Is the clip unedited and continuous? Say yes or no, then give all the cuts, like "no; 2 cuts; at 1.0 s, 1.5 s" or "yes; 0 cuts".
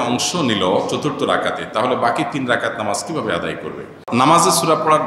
no; 1 cut; at 3.9 s